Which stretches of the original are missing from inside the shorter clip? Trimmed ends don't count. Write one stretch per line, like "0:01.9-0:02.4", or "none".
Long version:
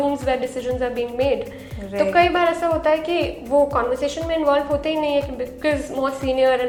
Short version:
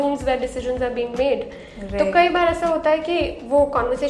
none